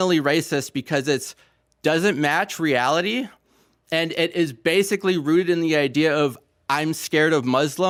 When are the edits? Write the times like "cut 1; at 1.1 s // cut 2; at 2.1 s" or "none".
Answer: none